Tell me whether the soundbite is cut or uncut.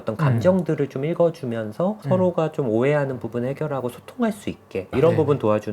uncut